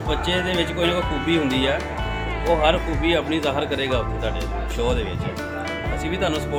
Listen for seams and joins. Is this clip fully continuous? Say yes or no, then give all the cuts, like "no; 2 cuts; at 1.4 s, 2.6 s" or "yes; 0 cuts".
yes; 0 cuts